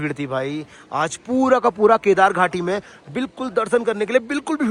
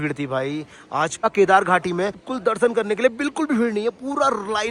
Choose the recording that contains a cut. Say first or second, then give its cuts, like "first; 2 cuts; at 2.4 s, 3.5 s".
second; 2 cuts; at 1.2 s, 2.3 s